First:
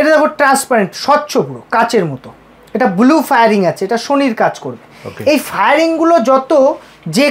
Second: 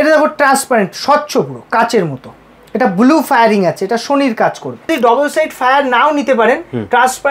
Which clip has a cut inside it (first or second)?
second